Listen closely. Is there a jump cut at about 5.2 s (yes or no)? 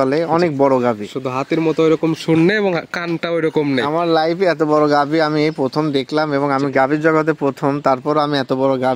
no